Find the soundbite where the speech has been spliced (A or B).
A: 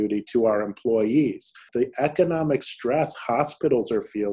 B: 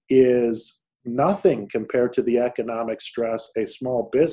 A